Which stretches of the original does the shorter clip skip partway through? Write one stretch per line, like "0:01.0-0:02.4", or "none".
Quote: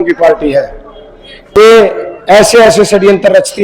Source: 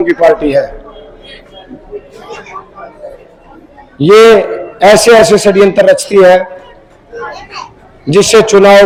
0:01.6-0:04.1